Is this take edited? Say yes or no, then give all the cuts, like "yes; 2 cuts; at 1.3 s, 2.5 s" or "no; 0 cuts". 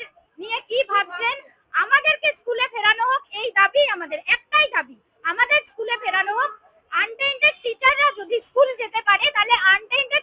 no; 0 cuts